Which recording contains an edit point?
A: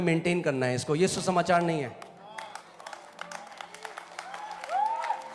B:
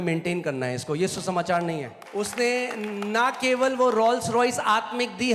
B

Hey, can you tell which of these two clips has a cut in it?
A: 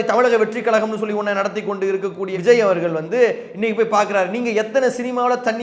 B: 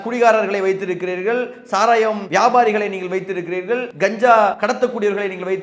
B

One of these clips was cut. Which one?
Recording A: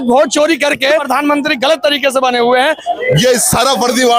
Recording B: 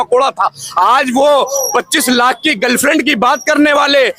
A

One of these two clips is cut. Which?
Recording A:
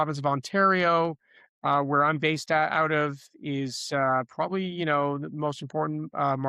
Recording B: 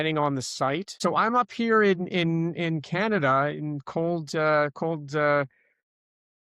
B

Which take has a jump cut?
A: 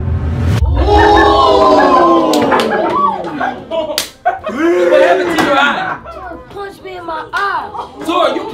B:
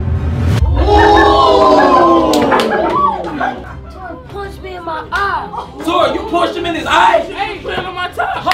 B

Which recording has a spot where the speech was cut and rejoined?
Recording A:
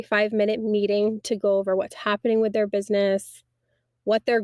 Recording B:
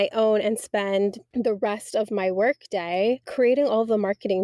B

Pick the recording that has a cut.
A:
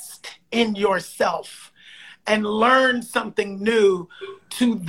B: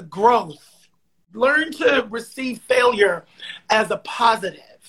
B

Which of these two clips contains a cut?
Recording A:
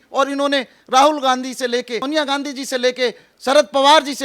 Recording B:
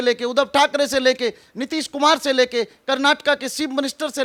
A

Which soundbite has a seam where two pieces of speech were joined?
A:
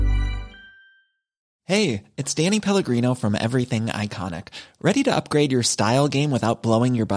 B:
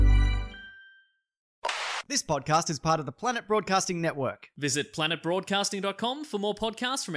B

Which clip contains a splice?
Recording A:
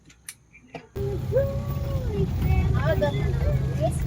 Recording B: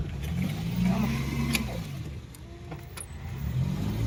A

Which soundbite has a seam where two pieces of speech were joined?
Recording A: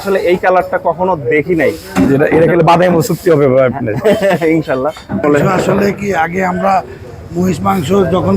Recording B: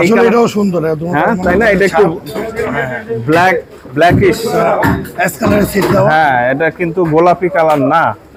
A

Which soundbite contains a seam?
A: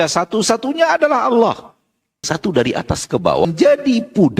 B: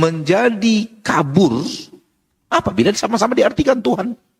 A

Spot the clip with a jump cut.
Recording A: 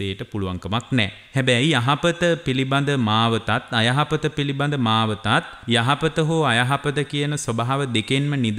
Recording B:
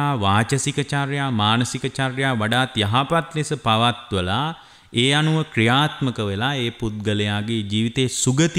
A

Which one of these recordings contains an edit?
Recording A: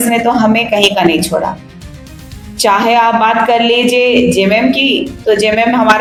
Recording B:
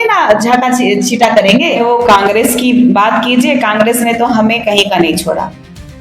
B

